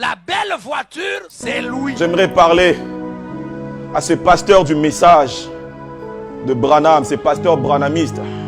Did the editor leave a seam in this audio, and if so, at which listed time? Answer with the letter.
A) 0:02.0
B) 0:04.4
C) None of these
A